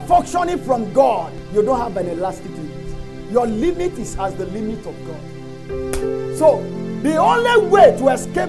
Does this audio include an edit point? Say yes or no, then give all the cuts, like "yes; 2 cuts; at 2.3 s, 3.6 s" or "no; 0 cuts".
yes; 1 cut; at 1.4 s